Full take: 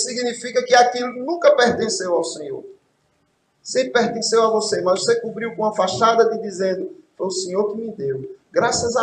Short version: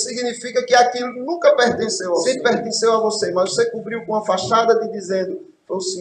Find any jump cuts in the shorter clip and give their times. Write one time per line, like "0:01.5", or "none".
0:02.2